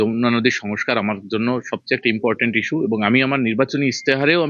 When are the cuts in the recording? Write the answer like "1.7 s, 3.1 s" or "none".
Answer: none